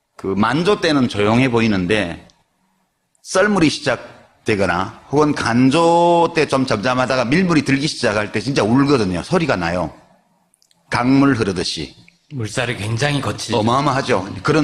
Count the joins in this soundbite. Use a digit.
1